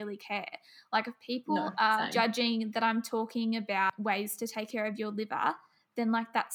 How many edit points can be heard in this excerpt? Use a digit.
2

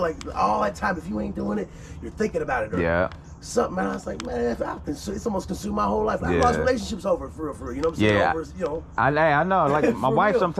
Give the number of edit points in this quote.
0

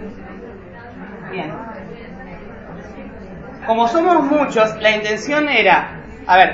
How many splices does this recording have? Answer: 1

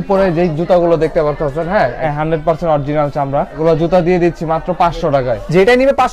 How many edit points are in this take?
2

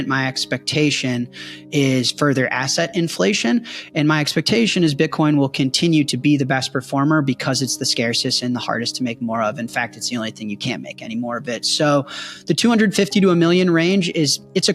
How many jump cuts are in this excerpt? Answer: 0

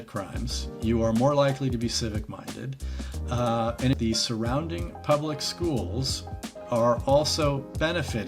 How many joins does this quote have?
1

